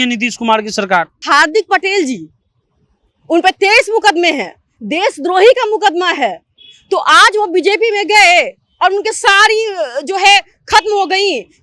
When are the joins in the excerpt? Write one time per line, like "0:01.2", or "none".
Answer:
0:01.2